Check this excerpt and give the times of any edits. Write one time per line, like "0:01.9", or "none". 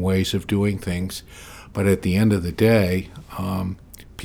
none